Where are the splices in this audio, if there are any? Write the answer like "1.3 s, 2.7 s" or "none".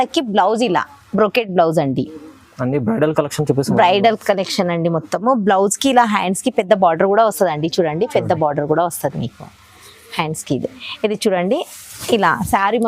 none